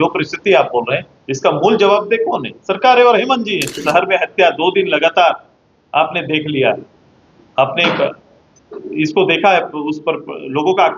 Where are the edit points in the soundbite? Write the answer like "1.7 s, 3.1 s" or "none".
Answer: 3.8 s